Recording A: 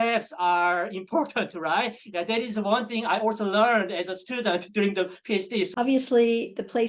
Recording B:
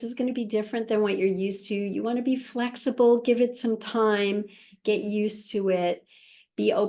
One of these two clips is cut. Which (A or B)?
A